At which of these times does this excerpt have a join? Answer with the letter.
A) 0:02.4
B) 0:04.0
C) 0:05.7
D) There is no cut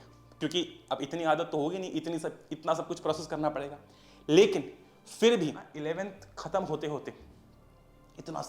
C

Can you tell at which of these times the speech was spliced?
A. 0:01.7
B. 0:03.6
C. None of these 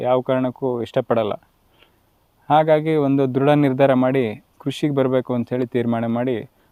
C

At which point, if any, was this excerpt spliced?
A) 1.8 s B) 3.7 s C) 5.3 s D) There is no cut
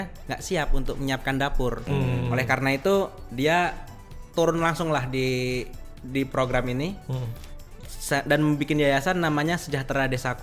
A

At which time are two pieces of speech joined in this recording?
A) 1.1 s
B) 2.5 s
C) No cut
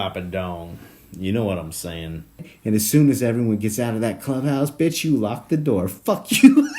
B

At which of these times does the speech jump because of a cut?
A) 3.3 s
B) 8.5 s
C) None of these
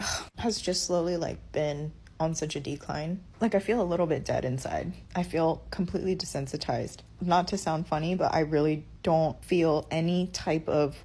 A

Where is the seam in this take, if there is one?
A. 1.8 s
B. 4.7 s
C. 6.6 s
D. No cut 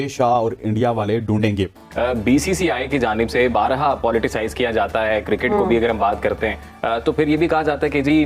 A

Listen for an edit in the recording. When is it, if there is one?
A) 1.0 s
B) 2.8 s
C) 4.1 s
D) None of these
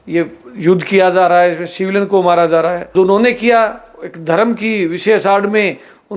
B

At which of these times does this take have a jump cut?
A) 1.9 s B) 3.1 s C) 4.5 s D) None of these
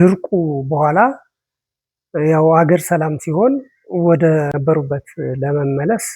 C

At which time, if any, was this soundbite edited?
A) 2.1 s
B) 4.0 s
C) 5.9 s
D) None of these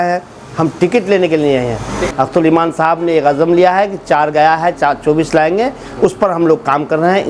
A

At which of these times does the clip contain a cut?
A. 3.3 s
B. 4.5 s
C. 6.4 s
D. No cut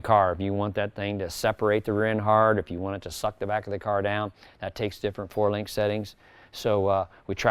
D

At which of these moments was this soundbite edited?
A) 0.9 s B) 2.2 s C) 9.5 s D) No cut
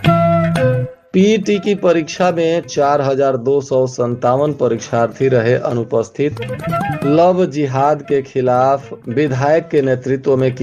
A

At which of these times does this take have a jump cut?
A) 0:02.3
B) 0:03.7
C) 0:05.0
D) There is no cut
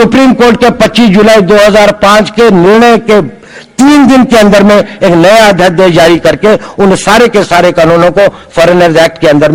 D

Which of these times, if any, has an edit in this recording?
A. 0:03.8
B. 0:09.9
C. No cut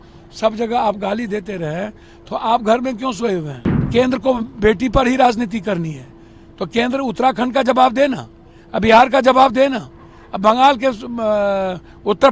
A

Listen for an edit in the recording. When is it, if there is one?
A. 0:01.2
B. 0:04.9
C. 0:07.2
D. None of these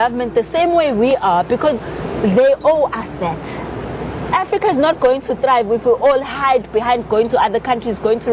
D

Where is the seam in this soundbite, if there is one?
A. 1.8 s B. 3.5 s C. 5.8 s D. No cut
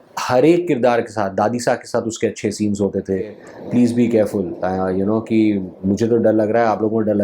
B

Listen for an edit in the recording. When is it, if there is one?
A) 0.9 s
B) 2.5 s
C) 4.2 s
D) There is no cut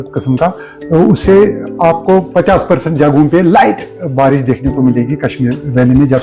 D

